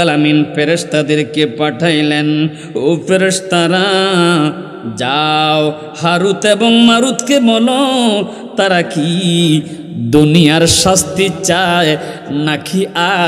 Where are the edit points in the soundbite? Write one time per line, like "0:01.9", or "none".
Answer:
none